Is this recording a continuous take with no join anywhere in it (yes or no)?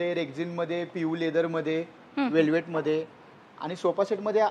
yes